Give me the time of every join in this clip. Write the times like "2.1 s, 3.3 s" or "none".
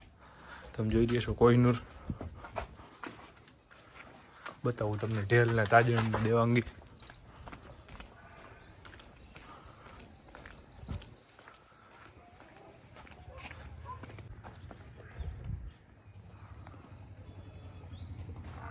14.3 s